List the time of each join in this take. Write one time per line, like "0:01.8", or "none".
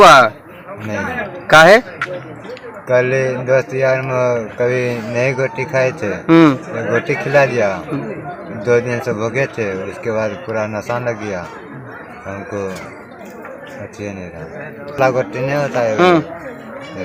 none